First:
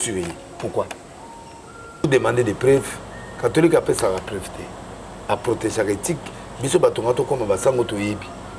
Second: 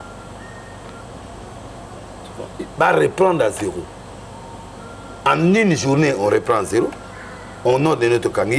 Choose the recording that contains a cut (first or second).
first